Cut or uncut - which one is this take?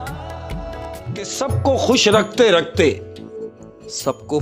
cut